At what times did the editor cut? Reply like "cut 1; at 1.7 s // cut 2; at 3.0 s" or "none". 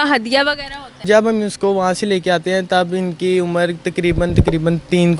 cut 1; at 1.0 s

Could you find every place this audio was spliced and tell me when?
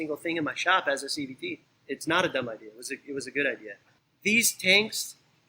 cut 1; at 1.7 s // cut 2; at 3.7 s

